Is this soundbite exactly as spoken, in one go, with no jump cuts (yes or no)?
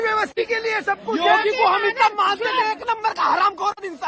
yes